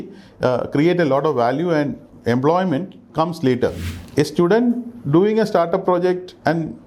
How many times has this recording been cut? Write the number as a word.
one